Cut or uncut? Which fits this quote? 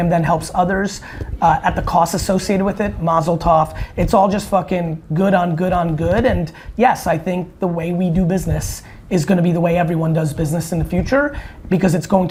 uncut